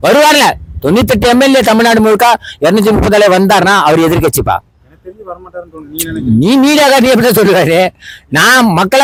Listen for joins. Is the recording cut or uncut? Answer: uncut